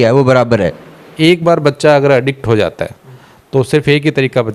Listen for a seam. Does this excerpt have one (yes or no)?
yes